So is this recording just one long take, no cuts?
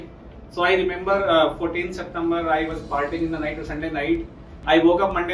yes; 0 cuts

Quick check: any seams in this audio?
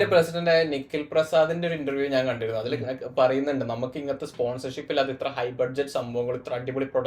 no; 0 cuts

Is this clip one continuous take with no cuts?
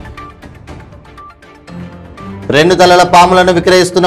no; 1 cut; at 2.4 s

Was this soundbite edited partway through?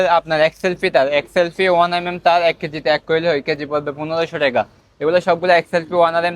no; 0 cuts

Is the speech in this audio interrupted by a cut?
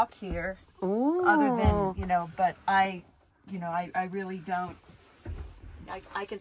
no; 0 cuts

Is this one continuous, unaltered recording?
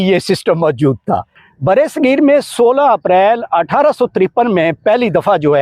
no; 1 cut; at 1.4 s

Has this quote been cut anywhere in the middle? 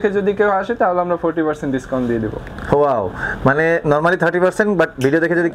no; 0 cuts

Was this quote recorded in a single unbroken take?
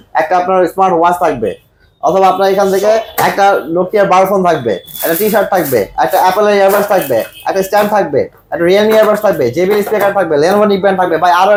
yes; 0 cuts

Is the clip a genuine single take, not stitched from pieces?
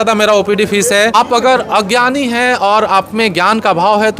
no; 1 cut; at 1.1 s

